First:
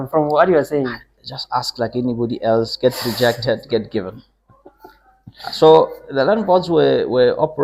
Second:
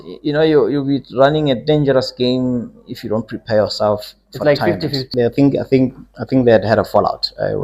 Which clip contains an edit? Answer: second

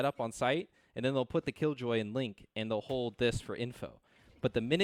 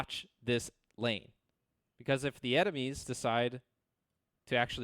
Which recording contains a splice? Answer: second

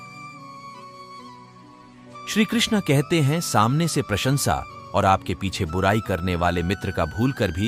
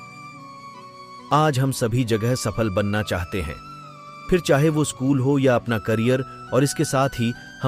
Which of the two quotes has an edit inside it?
second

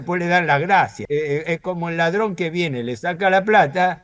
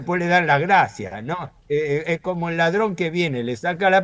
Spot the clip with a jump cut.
first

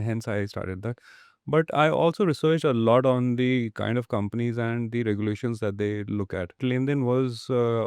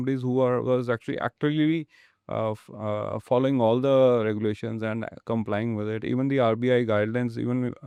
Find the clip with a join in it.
first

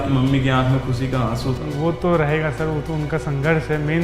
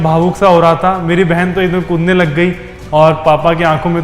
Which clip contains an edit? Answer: second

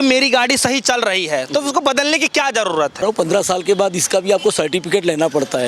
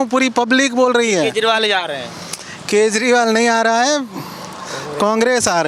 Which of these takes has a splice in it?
first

